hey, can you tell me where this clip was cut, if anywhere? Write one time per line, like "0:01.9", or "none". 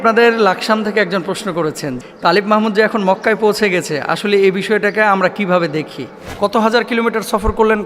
0:01.9
0:06.3